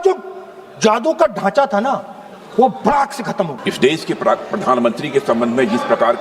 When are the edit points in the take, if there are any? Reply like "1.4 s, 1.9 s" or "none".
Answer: 3.6 s